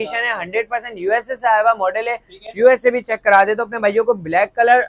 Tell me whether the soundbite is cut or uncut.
uncut